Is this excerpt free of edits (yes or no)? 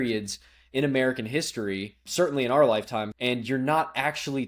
no